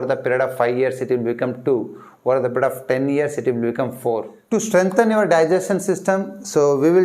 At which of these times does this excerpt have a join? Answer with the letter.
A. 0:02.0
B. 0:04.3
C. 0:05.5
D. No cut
B